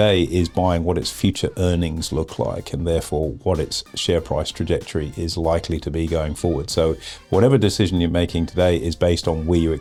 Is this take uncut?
yes; 0 cuts

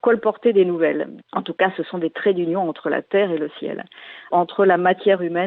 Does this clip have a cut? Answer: yes; 2 cuts; at 1.1 s, 4.3 s

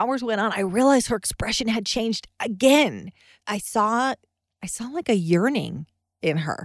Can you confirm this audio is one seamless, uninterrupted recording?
no; 1 cut; at 3.3 s

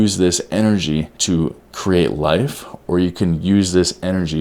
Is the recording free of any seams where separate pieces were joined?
no; 1 cut; at 1.1 s

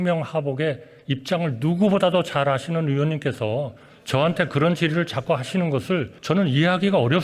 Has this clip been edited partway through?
yes; 1 cut; at 6.1 s

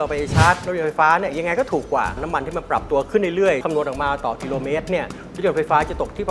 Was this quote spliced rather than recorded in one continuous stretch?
yes; 2 cuts; at 2.2 s, 3.6 s

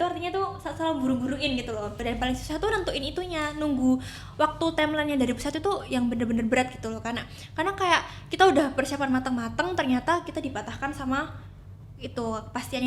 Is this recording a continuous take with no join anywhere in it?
no; 1 cut; at 2.0 s

